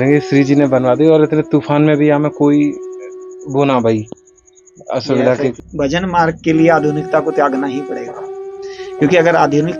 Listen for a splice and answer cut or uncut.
cut